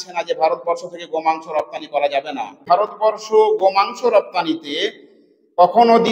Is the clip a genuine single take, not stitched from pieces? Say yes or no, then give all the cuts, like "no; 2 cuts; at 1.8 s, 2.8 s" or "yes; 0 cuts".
no; 1 cut; at 2.6 s